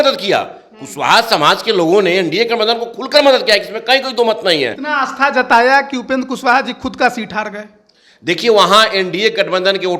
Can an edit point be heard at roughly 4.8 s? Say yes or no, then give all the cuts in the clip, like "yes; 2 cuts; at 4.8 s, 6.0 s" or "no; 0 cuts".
yes; 1 cut; at 4.8 s